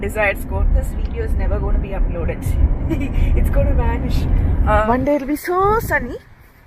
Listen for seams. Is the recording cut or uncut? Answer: cut